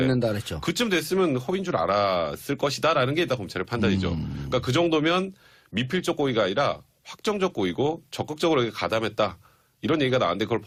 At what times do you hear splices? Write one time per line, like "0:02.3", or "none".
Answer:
none